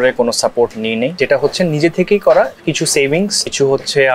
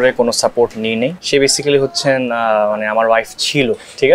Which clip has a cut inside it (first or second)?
second